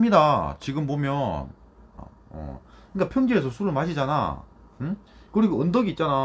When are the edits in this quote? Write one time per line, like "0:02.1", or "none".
0:01.9

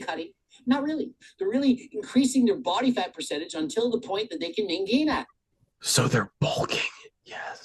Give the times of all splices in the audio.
none

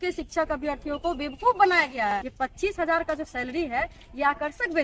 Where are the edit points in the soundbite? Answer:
0:02.1

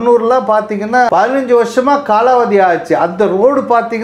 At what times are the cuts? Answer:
0:01.1

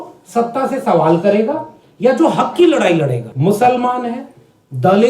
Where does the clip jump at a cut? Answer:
0:03.3

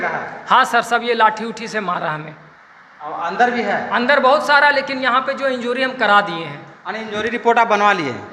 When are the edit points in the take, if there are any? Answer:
none

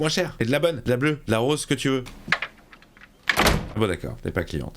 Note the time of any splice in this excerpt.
0:02.2
0:03.7

